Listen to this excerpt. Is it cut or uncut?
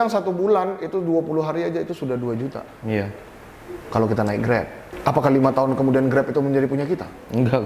cut